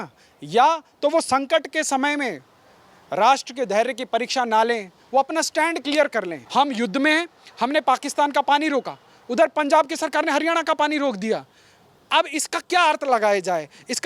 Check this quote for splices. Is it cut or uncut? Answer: cut